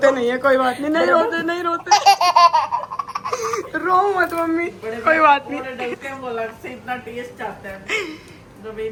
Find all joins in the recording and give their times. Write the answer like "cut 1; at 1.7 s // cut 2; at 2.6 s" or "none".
none